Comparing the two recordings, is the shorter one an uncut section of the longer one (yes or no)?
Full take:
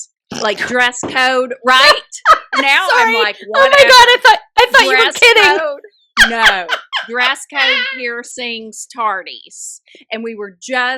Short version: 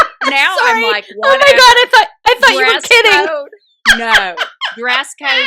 yes